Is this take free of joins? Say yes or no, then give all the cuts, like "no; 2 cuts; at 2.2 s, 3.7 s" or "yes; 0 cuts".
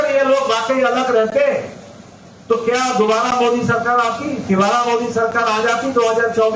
yes; 0 cuts